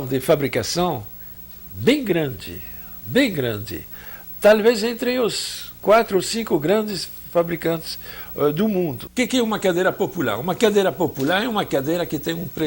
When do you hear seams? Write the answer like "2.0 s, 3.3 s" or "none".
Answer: 9.1 s